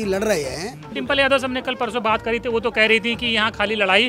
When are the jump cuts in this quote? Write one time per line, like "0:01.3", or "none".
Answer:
0:00.9